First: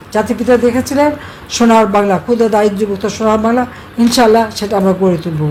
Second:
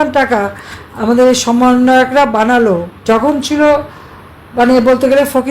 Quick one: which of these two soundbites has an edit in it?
second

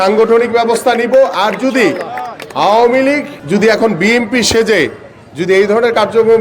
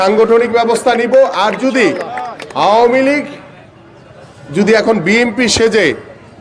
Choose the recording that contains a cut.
first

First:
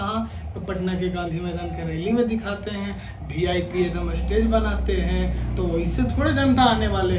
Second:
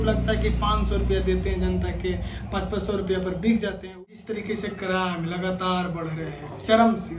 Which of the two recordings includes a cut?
second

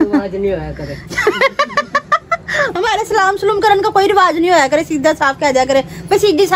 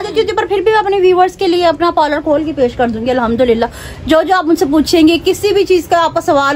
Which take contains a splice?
first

